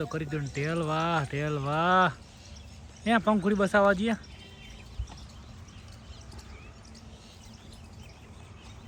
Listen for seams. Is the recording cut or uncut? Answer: uncut